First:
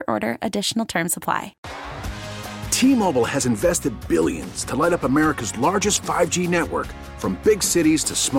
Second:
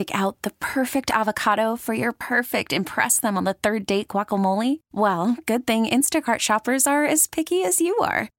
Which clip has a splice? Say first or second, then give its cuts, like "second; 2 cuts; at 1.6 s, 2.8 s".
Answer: first; 1 cut; at 1.6 s